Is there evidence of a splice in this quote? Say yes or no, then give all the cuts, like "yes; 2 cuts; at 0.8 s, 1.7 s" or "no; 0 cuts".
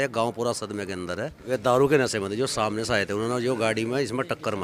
yes; 1 cut; at 1.3 s